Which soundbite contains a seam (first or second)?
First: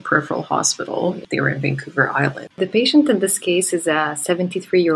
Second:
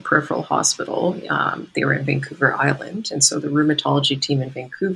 first